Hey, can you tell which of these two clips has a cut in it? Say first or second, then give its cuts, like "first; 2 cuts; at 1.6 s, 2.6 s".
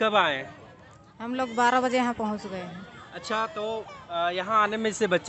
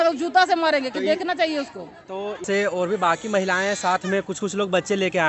second; 1 cut; at 2.4 s